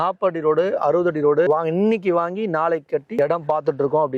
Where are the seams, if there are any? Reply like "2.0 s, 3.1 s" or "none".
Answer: 1.5 s, 3.1 s